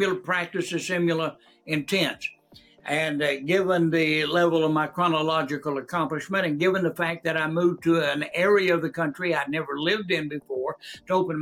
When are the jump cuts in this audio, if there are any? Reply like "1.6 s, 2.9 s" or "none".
none